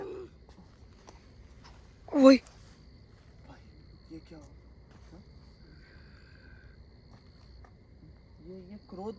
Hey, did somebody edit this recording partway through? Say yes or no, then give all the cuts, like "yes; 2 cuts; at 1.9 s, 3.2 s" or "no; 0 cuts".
no; 0 cuts